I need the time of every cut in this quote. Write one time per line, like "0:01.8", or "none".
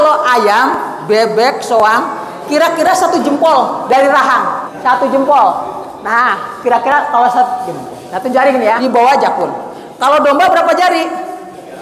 0:04.6
0:08.8